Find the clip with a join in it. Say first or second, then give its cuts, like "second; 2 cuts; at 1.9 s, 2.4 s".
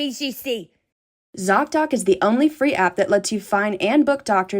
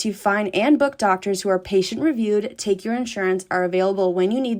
first; 1 cut; at 1.0 s